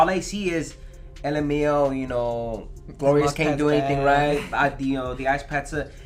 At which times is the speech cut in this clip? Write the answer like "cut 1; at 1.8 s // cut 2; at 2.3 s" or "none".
none